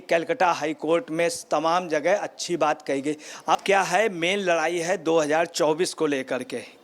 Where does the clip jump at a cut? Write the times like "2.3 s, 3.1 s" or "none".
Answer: 3.6 s